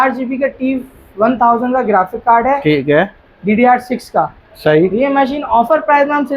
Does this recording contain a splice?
no; 0 cuts

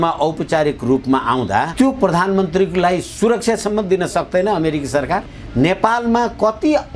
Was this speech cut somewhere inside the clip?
yes; 2 cuts; at 1.7 s, 5.4 s

